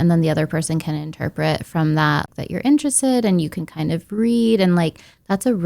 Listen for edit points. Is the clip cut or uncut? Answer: cut